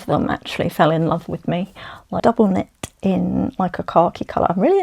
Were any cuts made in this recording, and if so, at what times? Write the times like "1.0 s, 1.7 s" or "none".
2.2 s